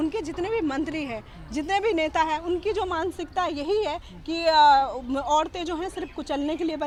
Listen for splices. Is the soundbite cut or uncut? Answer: uncut